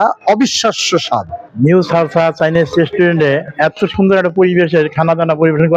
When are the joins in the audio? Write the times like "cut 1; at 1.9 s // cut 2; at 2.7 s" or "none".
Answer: cut 1; at 1.4 s